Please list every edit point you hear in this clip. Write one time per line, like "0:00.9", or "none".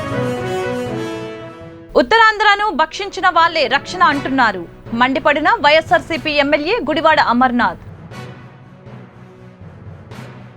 0:01.4